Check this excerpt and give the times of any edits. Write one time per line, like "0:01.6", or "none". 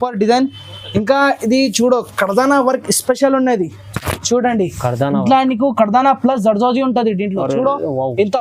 none